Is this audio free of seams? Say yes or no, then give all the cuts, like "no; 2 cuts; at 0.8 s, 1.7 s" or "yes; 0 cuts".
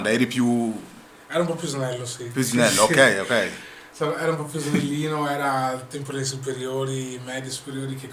yes; 0 cuts